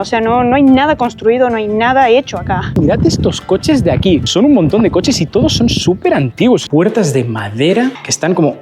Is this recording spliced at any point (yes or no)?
yes